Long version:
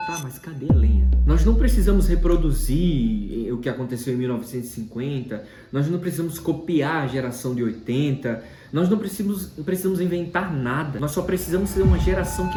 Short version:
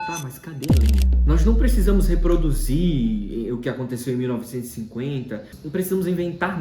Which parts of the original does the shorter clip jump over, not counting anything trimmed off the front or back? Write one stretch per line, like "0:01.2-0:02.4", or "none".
0:05.6-0:09.5